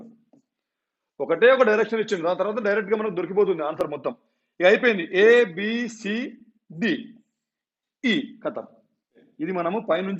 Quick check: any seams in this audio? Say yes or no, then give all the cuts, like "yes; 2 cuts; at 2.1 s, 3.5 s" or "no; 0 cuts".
no; 0 cuts